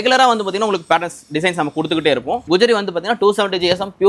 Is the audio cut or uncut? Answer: cut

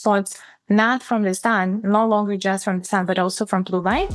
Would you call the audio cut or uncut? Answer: uncut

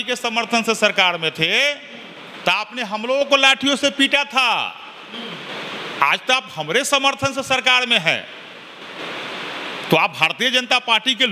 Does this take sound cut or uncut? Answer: uncut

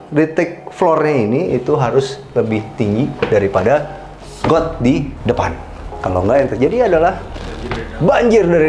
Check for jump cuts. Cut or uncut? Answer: cut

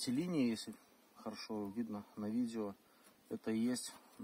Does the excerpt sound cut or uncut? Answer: uncut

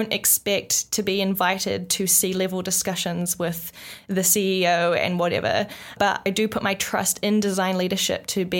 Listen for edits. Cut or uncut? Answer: cut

